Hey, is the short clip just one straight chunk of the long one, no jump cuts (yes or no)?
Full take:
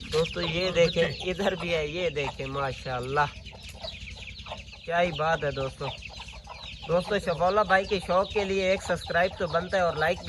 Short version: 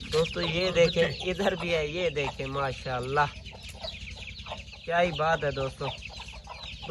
yes